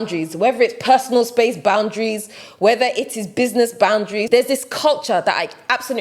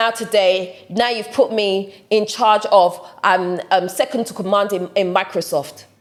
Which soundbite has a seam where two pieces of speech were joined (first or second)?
first